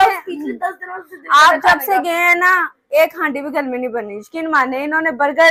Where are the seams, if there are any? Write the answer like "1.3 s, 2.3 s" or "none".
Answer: none